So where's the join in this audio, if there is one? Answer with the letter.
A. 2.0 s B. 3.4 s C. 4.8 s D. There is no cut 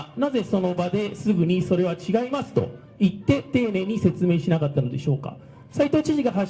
D